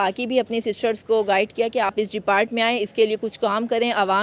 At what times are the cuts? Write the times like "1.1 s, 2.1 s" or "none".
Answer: 1.9 s